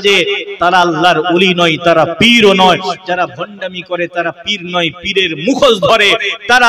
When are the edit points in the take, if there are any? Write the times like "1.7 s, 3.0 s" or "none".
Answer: none